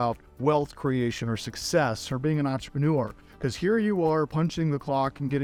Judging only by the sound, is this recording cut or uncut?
uncut